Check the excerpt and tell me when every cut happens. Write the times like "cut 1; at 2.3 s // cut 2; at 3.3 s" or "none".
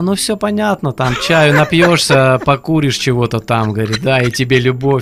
none